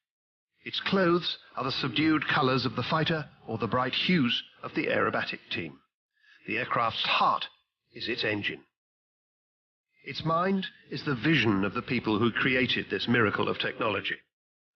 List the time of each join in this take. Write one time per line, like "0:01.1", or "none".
0:11.5